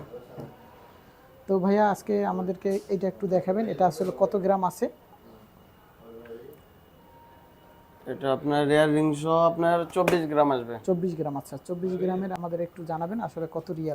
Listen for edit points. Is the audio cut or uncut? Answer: cut